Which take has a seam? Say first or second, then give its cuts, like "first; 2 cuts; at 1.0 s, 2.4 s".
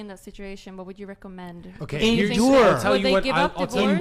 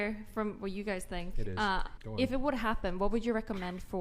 second; 1 cut; at 2.0 s